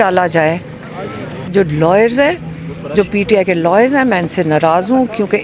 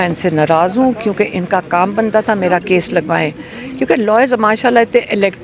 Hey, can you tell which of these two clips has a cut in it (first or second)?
first